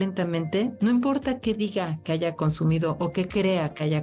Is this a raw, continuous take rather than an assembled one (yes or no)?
yes